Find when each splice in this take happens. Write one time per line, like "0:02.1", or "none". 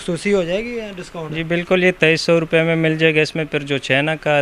none